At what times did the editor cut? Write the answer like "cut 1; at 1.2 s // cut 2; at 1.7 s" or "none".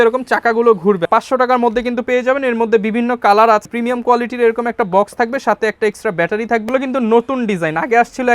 cut 1; at 1.1 s // cut 2; at 3.6 s // cut 3; at 6.7 s